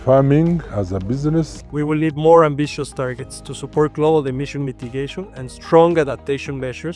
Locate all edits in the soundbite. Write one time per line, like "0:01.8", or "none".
0:01.6

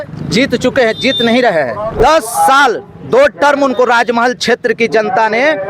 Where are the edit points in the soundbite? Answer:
0:02.0

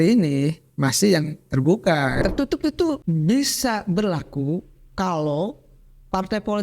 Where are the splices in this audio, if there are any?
0:02.2
0:03.0

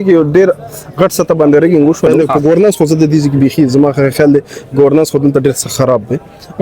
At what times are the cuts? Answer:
0:02.1

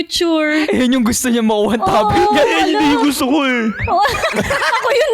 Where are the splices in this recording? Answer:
none

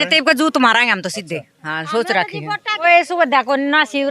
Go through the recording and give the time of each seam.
0:02.8

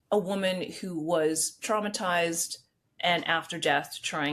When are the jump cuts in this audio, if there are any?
0:02.9

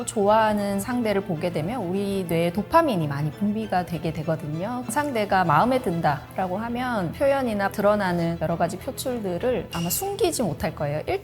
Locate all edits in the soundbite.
0:04.9

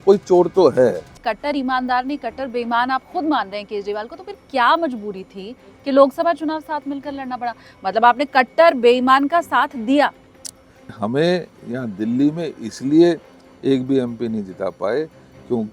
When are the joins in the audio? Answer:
0:01.2
0:11.0

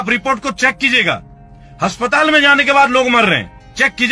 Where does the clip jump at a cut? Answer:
none

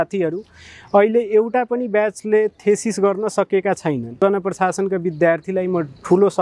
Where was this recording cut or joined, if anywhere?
0:04.2

